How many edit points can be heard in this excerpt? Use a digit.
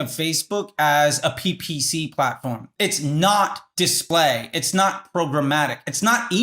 1